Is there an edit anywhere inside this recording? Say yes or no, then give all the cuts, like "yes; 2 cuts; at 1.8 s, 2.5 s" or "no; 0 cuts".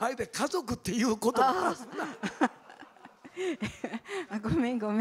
no; 0 cuts